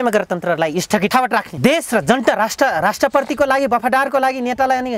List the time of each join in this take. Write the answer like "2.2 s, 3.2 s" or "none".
1.1 s